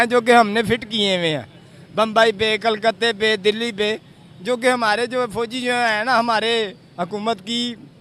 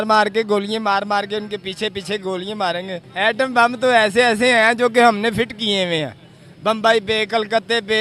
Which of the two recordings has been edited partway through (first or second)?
second